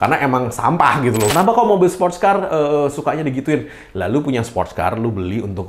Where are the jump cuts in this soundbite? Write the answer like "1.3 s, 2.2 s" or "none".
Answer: 1.3 s